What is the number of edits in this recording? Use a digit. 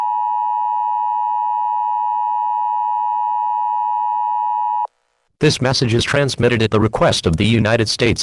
1